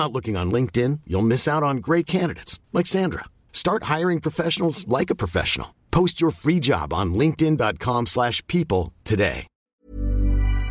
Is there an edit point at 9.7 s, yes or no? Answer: yes